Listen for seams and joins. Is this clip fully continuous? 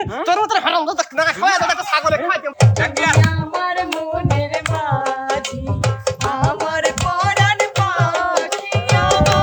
no; 1 cut; at 2.5 s

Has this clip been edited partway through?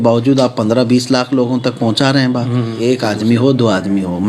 yes; 1 cut; at 2.8 s

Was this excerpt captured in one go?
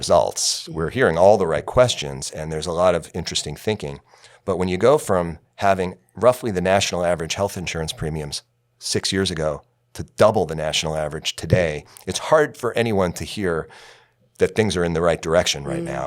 yes; 0 cuts

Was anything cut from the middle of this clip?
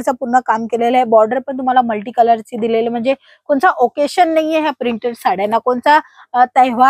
no; 0 cuts

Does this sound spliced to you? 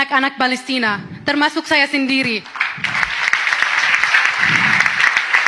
no; 0 cuts

